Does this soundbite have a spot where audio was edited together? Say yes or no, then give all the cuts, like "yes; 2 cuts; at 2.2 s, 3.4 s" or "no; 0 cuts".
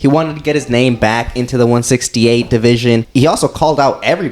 yes; 1 cut; at 3.1 s